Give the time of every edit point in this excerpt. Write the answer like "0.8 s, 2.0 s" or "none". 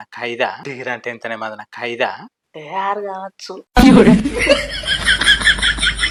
none